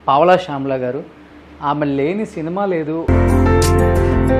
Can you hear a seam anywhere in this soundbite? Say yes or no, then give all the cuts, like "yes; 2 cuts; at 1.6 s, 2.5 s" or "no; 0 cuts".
yes; 1 cut; at 3.0 s